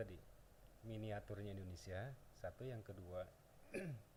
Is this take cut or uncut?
uncut